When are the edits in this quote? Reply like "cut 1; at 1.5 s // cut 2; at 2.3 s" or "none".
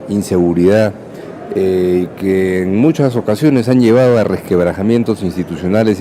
cut 1; at 3.3 s